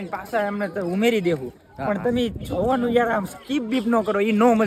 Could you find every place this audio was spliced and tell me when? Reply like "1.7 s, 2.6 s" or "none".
none